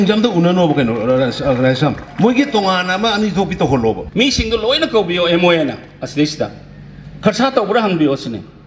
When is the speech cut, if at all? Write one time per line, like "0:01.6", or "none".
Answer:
0:04.0